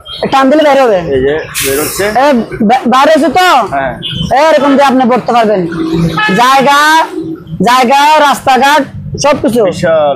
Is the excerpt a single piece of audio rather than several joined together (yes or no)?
yes